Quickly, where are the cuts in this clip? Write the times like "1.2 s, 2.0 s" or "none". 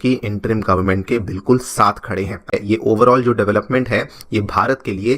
2.5 s